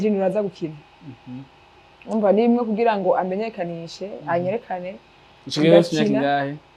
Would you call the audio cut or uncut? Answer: uncut